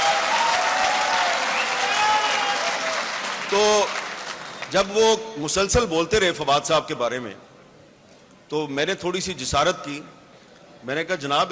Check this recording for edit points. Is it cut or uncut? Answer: uncut